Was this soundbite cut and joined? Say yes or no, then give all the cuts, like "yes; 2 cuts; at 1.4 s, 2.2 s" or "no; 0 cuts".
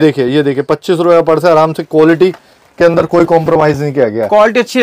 no; 0 cuts